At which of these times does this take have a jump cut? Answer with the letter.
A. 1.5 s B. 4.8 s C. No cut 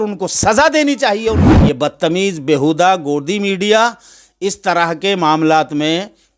A